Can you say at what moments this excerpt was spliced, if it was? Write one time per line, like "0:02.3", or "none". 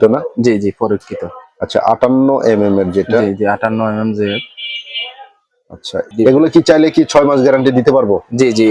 0:06.0